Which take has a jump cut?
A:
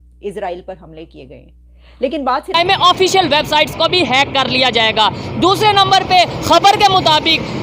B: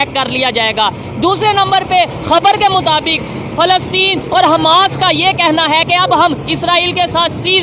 A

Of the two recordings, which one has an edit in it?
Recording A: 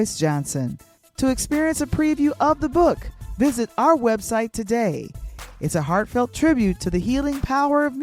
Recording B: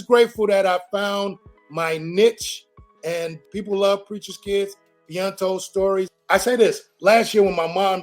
B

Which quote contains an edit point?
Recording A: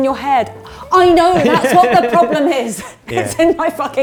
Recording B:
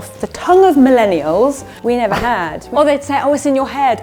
B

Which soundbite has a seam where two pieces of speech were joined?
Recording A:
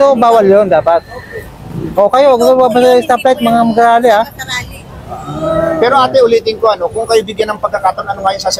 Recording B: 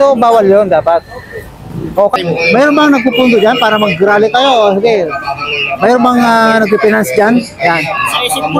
B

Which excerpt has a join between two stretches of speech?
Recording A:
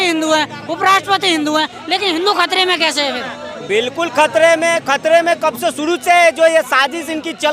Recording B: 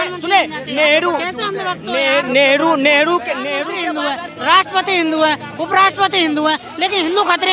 B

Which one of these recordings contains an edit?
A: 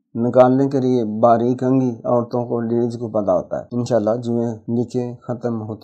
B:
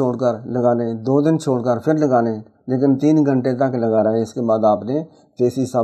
A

